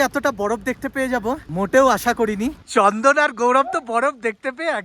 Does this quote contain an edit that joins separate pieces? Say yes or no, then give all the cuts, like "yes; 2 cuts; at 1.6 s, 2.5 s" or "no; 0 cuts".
yes; 1 cut; at 2.6 s